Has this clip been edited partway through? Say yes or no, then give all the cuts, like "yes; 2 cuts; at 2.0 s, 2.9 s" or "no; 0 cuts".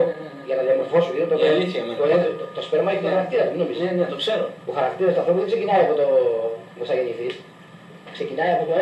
no; 0 cuts